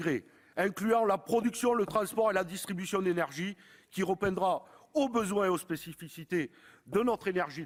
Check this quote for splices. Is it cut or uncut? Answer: uncut